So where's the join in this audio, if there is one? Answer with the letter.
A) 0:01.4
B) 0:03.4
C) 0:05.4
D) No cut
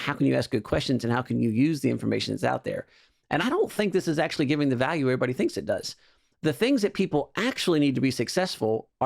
B